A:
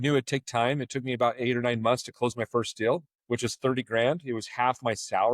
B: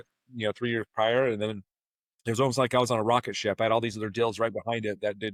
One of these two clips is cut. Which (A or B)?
A